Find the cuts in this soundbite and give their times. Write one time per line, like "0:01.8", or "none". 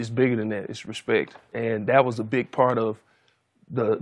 none